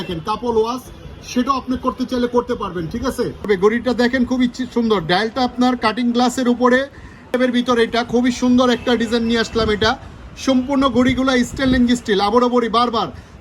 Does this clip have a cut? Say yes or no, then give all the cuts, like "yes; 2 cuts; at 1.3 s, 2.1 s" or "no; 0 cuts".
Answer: yes; 2 cuts; at 3.5 s, 7.3 s